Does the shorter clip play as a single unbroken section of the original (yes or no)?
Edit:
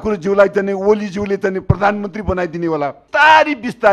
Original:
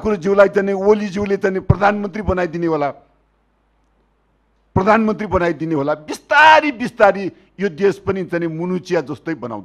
no